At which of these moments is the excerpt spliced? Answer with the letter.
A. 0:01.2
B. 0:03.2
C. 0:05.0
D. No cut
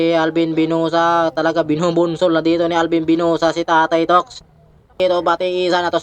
C